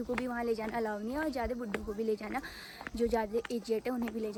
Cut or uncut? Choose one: uncut